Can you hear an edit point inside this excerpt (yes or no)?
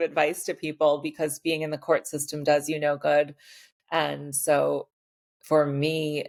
no